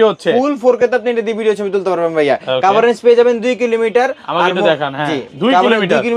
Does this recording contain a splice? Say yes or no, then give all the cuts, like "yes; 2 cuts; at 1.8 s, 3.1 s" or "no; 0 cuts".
no; 0 cuts